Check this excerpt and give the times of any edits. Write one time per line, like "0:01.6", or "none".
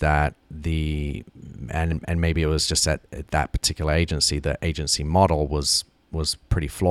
none